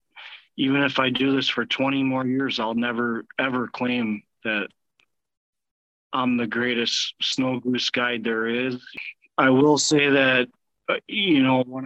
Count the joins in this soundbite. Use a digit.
1